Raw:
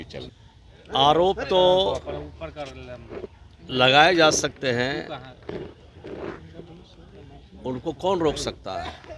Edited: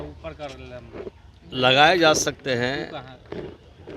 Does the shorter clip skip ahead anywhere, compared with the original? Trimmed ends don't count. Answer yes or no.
no